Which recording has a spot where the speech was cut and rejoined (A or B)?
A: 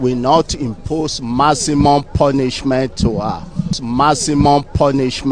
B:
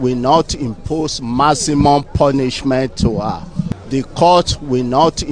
A